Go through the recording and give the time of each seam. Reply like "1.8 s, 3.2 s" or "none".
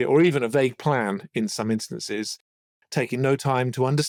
none